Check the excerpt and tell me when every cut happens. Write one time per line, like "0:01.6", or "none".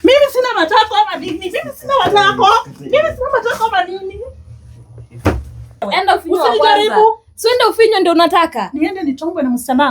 0:05.8